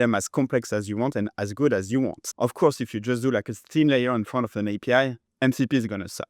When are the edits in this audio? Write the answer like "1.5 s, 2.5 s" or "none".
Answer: 2.2 s, 5.2 s